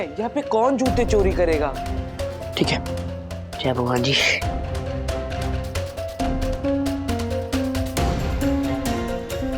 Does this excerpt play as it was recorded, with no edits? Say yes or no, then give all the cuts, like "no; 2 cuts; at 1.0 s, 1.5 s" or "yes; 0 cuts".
yes; 0 cuts